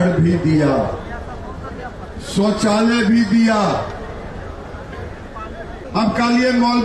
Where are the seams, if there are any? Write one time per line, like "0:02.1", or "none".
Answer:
0:05.8